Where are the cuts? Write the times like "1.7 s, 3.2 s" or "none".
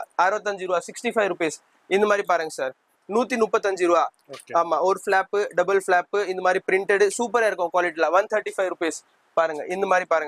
none